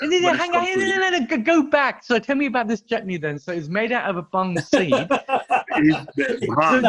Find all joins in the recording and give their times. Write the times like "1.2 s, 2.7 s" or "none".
none